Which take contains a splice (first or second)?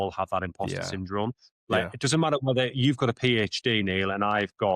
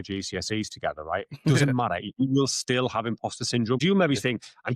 second